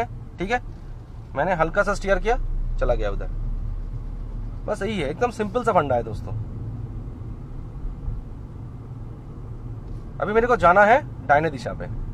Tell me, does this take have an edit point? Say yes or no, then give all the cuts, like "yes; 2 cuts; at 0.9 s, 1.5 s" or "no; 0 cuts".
no; 0 cuts